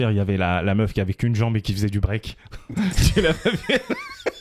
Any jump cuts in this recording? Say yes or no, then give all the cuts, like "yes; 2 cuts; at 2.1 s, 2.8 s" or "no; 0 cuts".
no; 0 cuts